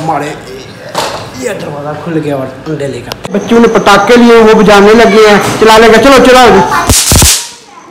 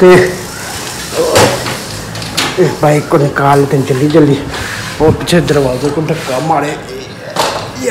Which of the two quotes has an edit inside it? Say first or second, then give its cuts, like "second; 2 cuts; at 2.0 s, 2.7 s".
first; 1 cut; at 3.2 s